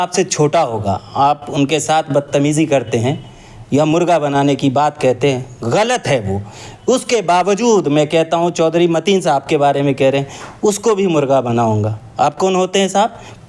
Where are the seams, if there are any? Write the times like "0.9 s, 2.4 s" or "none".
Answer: none